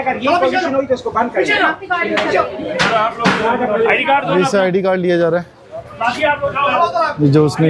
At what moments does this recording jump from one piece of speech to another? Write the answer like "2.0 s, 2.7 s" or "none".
none